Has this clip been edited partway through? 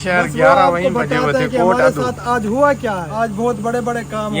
yes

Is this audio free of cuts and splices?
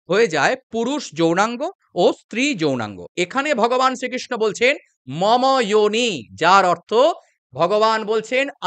no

